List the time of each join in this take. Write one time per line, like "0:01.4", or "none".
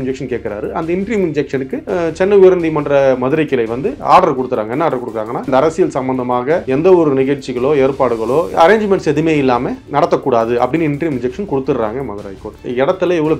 0:01.8
0:05.5
0:06.6
0:08.5
0:09.8
0:12.5